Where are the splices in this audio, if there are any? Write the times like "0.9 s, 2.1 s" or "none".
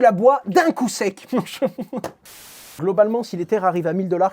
2.7 s